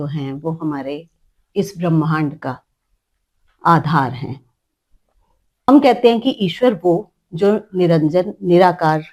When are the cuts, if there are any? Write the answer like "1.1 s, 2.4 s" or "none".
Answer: 5.7 s

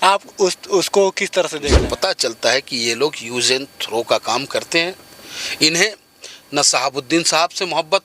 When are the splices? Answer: 1.9 s

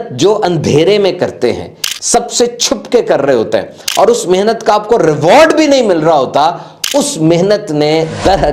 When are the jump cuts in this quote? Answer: none

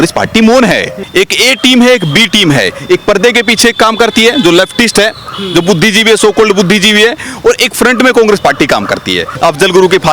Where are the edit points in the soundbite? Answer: 1.0 s, 9.3 s

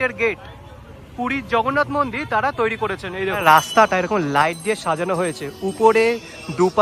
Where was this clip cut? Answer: 3.4 s

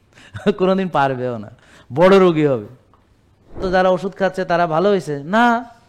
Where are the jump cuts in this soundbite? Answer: 3.6 s

